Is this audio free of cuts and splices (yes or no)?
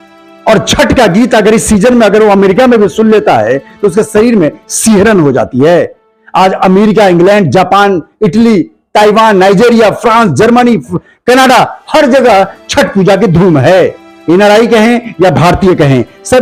yes